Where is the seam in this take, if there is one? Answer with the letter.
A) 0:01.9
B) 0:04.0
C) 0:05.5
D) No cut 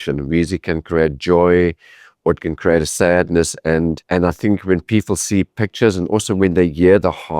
B